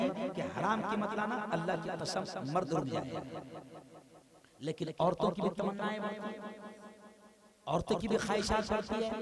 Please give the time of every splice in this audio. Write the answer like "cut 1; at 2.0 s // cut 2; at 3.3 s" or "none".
none